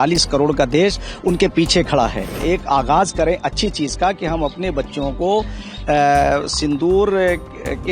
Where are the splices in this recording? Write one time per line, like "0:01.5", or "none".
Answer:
0:02.4